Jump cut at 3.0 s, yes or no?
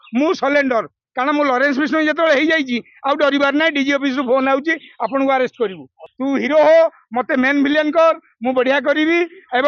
no